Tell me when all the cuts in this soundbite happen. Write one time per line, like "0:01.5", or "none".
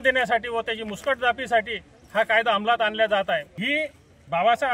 0:03.5